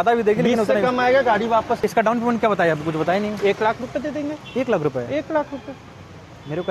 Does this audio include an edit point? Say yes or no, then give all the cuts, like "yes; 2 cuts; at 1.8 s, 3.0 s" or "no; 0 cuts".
yes; 1 cut; at 1.8 s